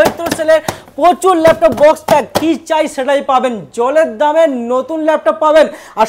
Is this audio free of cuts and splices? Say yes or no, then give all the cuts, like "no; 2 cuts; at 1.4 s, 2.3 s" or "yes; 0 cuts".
yes; 0 cuts